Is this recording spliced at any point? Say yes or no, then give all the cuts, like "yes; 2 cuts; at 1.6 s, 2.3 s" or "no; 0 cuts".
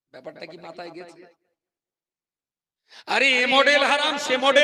no; 0 cuts